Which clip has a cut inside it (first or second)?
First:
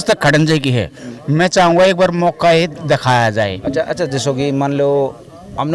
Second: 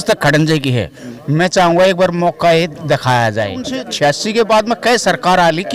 second